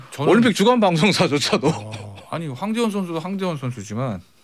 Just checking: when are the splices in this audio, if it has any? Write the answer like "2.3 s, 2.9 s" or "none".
none